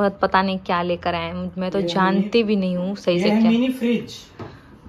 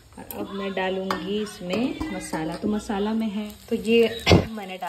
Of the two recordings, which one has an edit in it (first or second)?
second